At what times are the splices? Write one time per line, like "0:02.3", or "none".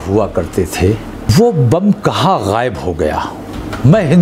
0:01.3